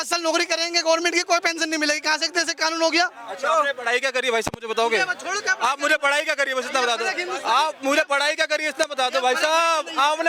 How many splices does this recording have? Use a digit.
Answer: 0